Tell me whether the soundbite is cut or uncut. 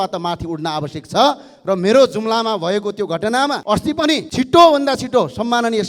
uncut